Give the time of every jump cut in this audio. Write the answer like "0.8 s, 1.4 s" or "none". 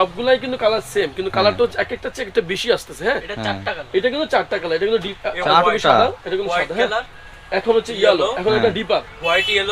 none